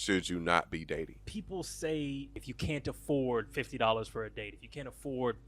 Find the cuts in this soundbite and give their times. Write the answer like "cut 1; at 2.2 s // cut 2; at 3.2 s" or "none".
cut 1; at 1.2 s // cut 2; at 2.5 s